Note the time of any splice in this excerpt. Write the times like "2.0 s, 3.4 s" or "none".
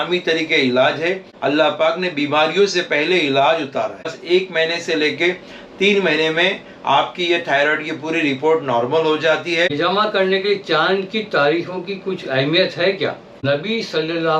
1.3 s, 4.2 s, 9.7 s, 13.4 s